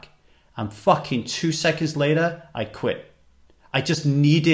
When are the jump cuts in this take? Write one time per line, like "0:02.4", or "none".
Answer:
none